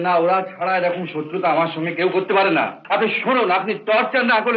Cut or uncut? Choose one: cut